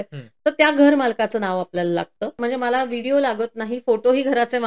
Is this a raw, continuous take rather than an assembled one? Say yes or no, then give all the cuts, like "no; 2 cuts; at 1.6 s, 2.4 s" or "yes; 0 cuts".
no; 1 cut; at 2.4 s